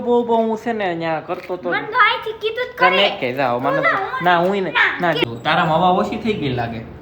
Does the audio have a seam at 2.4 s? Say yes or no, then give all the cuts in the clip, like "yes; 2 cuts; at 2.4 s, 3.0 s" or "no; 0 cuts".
no; 1 cut; at 5.2 s